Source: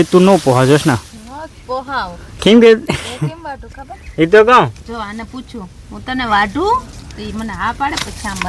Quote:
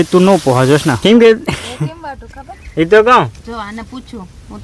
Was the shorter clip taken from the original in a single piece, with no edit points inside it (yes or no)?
no